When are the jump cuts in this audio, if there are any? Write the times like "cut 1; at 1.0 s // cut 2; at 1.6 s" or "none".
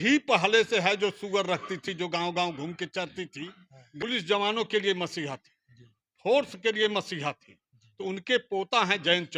cut 1; at 3.9 s

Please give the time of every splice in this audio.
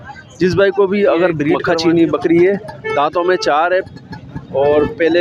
cut 1; at 1.6 s

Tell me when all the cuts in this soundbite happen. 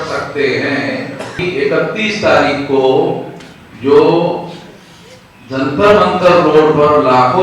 cut 1; at 1.4 s

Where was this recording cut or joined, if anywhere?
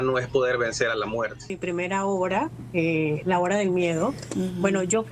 cut 1; at 1.6 s

